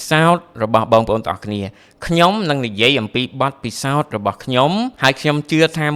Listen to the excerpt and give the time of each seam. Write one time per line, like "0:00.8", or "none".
0:04.9